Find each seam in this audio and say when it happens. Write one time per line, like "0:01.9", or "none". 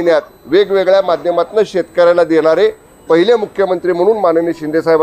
none